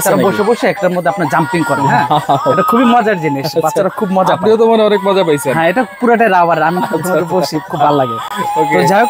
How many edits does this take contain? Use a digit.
0